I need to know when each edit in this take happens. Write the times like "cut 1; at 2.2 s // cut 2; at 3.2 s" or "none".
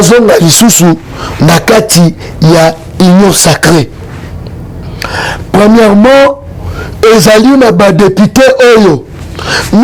none